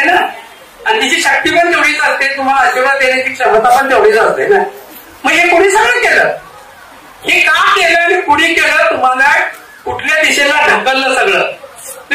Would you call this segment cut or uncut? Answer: uncut